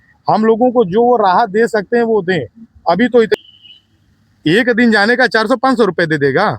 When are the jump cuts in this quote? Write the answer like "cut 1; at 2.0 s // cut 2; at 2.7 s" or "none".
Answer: cut 1; at 3.4 s